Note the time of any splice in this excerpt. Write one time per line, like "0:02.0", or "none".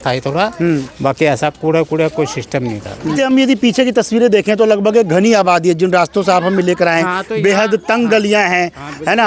0:03.2